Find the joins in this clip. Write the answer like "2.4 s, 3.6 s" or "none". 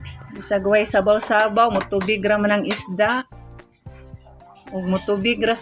none